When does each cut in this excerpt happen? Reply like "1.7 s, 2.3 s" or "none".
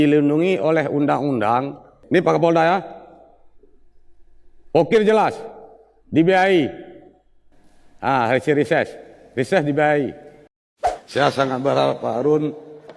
1.9 s, 10.5 s